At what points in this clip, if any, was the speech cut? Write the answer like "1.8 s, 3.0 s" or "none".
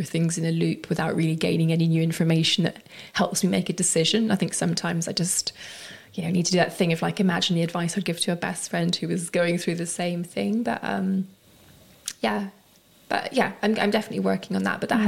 none